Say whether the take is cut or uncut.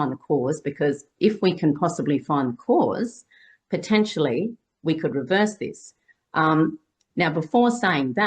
uncut